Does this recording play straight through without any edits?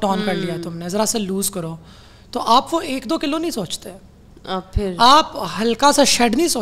yes; 0 cuts

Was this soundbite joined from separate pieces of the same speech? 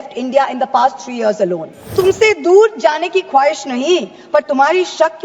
yes; 1 cut; at 1.9 s

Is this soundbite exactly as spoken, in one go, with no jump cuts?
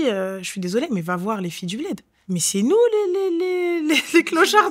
no; 1 cut; at 2.1 s

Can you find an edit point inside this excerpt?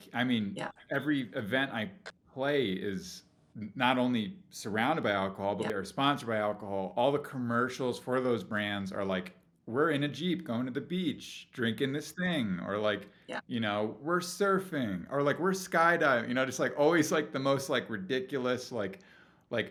no; 0 cuts

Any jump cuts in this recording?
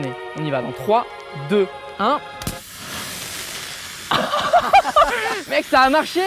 no; 0 cuts

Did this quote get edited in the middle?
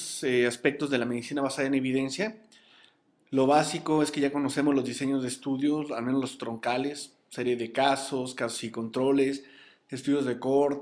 yes; 1 cut; at 8.7 s

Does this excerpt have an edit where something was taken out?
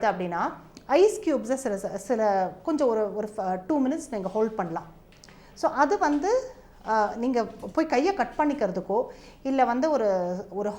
no; 0 cuts

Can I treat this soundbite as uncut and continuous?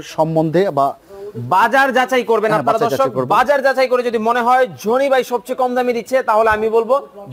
yes; 0 cuts

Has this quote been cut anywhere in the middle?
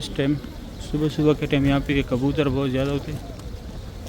no; 0 cuts

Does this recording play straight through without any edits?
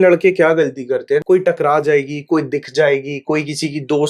no; 1 cut; at 1.2 s

